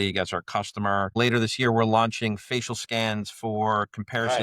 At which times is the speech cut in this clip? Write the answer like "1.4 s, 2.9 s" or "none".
1.2 s